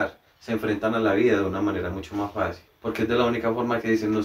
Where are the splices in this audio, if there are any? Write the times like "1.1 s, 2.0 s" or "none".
2.7 s